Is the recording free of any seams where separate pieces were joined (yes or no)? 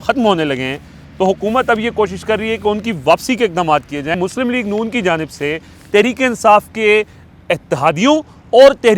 no